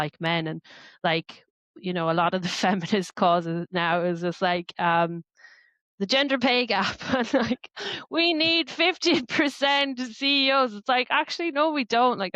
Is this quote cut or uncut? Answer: uncut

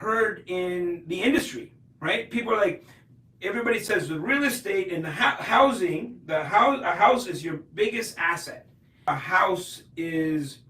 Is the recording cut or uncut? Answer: cut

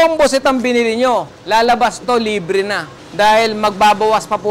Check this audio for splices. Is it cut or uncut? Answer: uncut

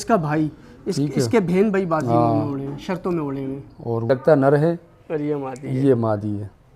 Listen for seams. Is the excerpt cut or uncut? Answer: cut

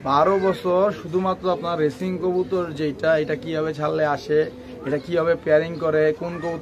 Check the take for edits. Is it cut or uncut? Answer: uncut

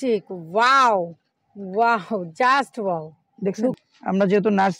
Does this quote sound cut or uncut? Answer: cut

